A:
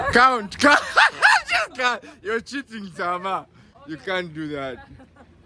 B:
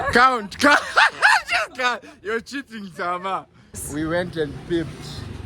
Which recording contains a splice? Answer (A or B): B